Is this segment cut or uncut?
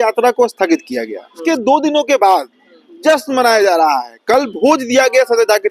cut